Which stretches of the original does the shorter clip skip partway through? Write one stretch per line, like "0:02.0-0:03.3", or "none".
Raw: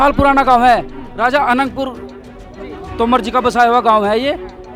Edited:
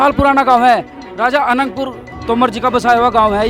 0:02.1-0:02.8

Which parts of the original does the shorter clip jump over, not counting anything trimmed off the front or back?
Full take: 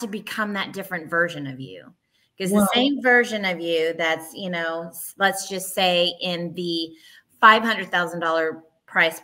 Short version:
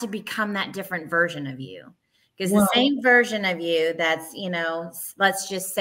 none

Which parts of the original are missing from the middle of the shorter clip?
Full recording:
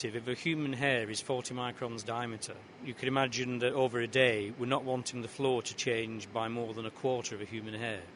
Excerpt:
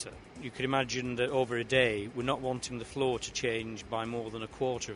none

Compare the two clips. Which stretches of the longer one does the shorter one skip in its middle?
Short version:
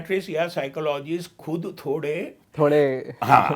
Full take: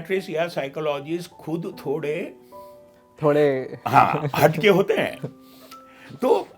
0:02.4-0:03.0

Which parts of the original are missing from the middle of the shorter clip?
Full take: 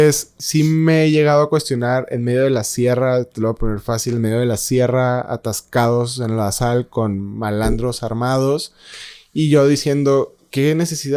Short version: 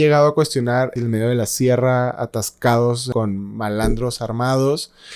0:02.1-0:04.1
0:06.2-0:06.9

